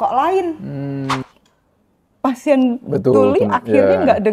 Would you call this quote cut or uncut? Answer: cut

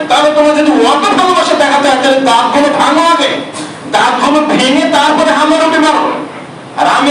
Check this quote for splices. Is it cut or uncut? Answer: uncut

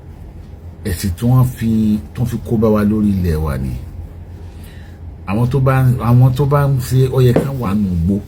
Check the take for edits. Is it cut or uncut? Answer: uncut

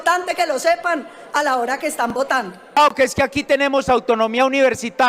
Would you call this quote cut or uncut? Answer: cut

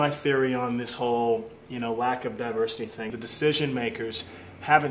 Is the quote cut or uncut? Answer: cut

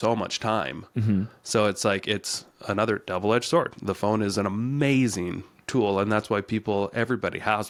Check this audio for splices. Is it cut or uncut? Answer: uncut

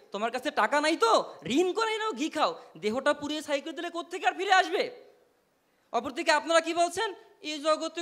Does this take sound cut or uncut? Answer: uncut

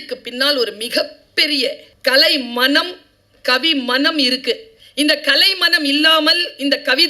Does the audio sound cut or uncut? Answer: cut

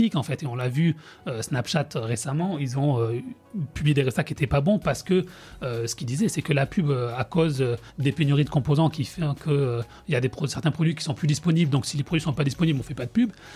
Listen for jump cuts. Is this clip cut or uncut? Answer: cut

